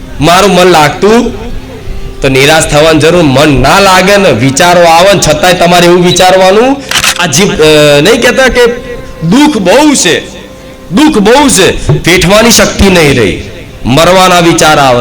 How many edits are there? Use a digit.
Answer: 1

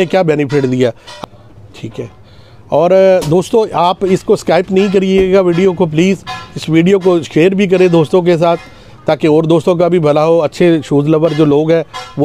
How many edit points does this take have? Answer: 1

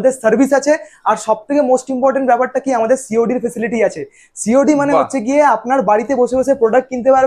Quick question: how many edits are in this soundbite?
0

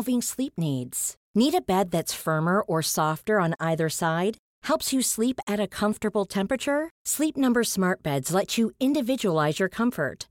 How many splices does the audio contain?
0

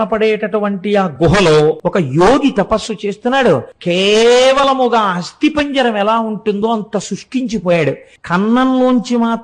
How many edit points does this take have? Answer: 3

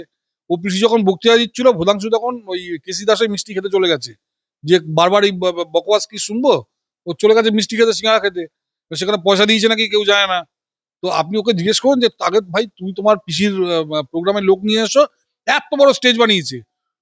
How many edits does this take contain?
0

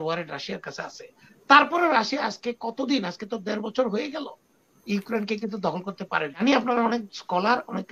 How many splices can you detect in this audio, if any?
1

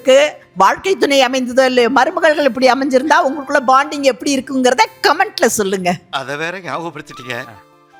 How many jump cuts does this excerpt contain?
0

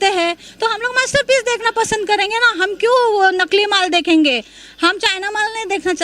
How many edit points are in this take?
0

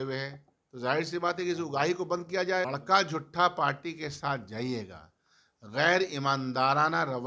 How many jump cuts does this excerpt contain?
1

